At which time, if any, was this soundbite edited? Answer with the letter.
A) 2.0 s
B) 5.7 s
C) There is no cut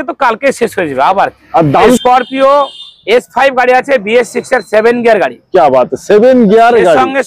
A